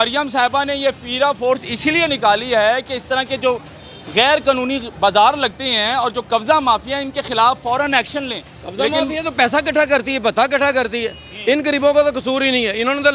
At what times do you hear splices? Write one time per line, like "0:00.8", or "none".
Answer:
none